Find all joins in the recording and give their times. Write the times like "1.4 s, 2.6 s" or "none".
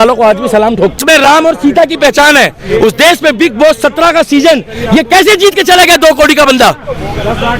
1.0 s